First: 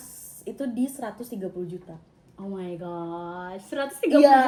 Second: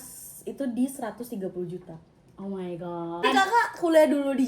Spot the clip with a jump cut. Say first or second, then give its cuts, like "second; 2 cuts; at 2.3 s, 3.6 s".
second; 1 cut; at 3.2 s